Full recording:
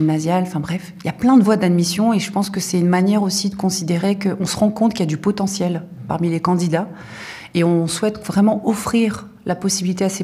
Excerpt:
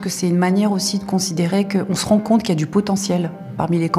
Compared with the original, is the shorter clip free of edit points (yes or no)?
yes